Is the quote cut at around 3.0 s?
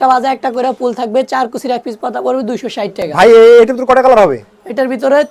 no; 0 cuts

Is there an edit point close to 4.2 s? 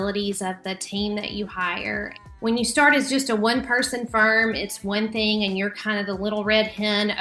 no; 1 cut; at 2.2 s

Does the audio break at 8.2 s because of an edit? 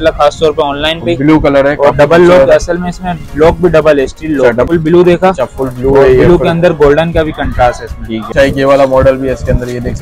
yes; 2 cuts; at 4.7 s, 8.2 s

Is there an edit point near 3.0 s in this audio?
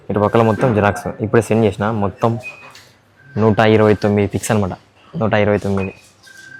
no; 0 cuts

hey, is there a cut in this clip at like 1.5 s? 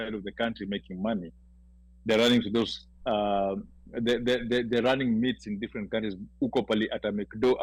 no; 0 cuts

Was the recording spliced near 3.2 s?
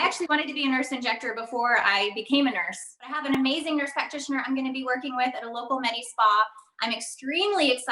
yes; 1 cut; at 3.2 s

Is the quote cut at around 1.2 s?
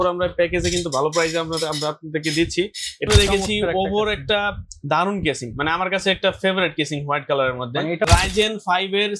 no; 2 cuts; at 3.1 s, 8.0 s

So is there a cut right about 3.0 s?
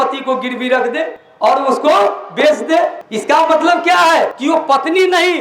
no; 2 cuts; at 1.2 s, 4.4 s

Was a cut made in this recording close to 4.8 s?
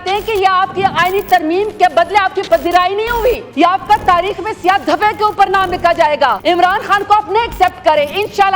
no; 2 cuts; at 3.5 s, 6.4 s

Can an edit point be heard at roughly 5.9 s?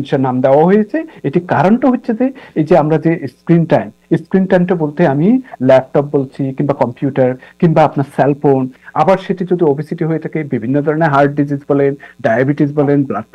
no; 1 cut; at 8.8 s

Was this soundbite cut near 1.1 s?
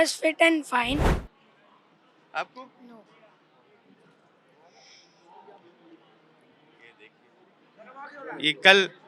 yes; 1 cut; at 1.1 s

